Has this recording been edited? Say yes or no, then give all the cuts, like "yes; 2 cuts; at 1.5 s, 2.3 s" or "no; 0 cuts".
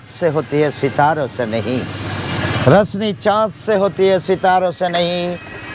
no; 0 cuts